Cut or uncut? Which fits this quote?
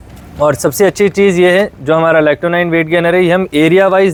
uncut